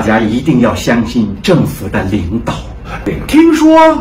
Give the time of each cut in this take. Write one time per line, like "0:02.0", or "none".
0:03.0